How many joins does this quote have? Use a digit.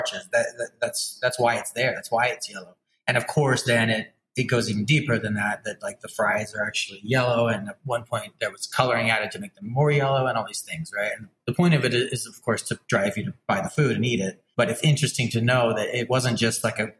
4